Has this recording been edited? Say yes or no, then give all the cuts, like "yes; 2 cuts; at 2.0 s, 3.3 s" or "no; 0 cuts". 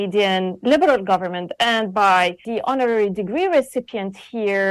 yes; 1 cut; at 2.5 s